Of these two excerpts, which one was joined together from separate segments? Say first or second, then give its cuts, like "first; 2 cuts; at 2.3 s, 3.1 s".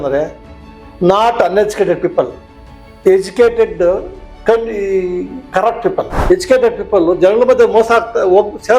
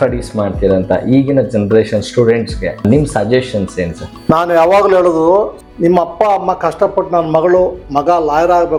first; 1 cut; at 6.1 s